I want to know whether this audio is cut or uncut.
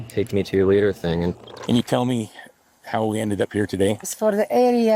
cut